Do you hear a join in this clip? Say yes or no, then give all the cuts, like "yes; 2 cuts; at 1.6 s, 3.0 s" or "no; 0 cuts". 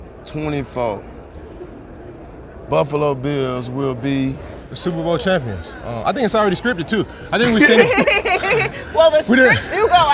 no; 0 cuts